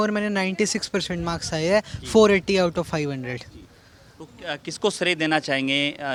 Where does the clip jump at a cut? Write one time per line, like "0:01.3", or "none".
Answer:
none